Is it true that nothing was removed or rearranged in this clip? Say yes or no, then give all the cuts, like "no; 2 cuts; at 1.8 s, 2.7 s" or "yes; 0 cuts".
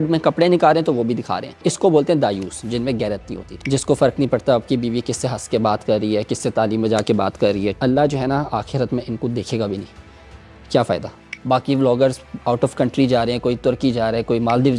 no; 3 cuts; at 1.7 s, 7.8 s, 11.3 s